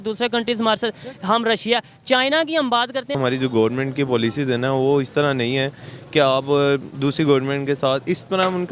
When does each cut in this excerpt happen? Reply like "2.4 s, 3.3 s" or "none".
3.2 s